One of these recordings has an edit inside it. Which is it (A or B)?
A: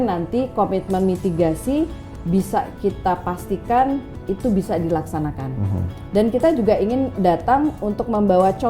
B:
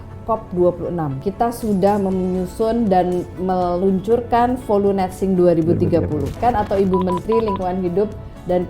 B